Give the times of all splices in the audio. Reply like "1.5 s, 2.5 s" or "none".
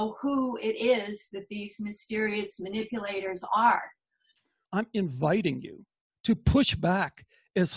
4.5 s